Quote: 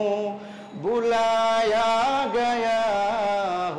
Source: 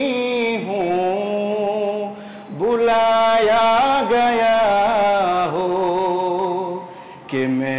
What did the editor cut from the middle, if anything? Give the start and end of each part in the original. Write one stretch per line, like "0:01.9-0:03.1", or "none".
none